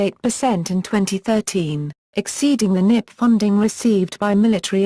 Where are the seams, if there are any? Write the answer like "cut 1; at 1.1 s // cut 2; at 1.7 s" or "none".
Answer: cut 1; at 3.7 s